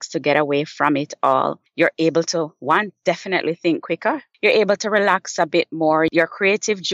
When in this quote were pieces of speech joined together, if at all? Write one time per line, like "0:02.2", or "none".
0:01.6
0:04.3
0:06.1